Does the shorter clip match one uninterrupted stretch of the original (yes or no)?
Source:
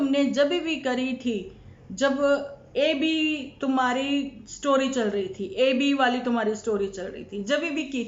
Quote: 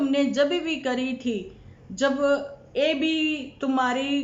yes